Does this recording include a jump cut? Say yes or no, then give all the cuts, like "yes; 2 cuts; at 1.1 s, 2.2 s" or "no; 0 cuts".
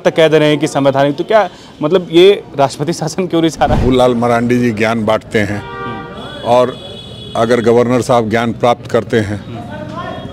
yes; 1 cut; at 3.8 s